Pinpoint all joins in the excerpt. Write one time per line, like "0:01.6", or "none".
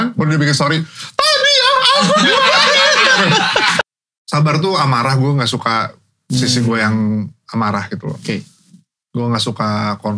0:03.8